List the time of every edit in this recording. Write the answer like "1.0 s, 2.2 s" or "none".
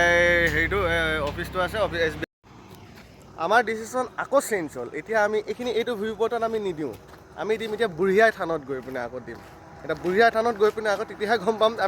2.2 s